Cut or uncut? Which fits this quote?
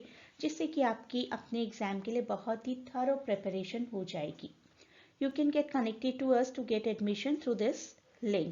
cut